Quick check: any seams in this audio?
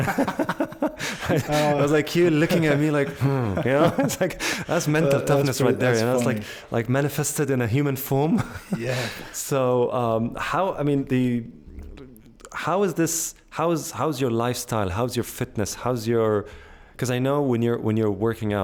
no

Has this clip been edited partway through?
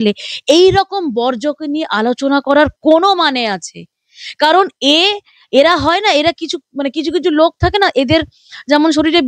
no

